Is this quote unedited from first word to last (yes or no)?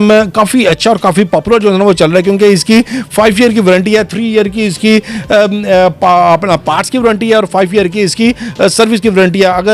yes